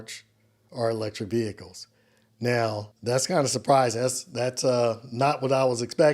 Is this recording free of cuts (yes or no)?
no